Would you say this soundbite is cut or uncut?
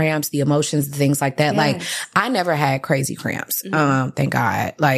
uncut